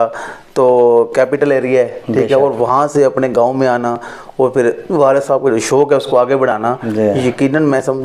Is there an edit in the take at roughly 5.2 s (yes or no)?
no